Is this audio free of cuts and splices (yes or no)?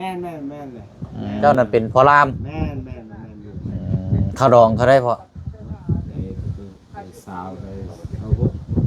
no